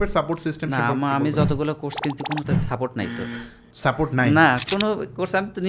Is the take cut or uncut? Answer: cut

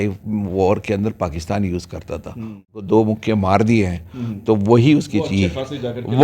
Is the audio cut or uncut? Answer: cut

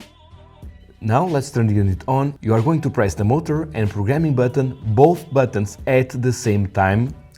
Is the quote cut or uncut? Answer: cut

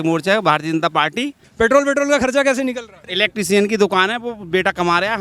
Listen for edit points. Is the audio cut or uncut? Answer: cut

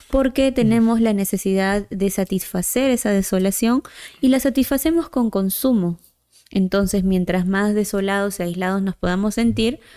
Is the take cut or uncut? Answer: uncut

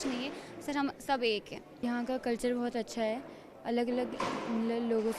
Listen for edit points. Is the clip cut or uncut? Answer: cut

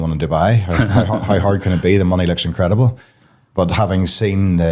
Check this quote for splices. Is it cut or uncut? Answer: uncut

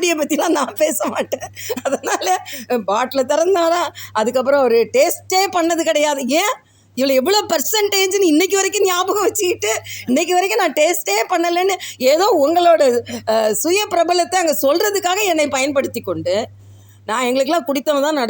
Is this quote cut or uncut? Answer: uncut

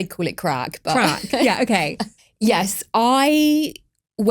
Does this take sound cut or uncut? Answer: cut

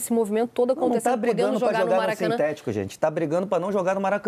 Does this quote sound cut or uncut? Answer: uncut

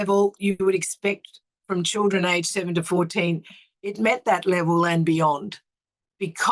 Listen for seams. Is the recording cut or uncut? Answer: uncut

